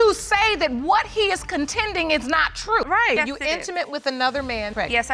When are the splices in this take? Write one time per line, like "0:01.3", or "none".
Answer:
0:03.2